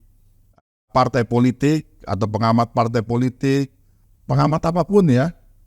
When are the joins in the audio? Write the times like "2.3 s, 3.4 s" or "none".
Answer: 4.0 s